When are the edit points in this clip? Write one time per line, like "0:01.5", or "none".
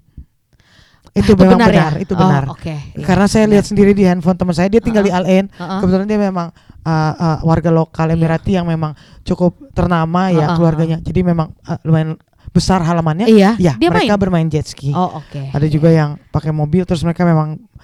none